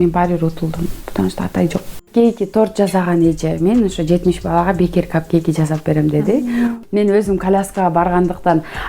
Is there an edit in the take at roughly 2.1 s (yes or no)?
yes